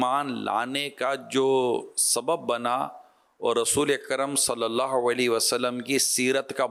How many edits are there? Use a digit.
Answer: 0